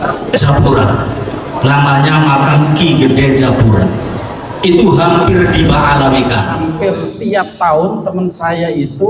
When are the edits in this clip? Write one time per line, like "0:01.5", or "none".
0:06.6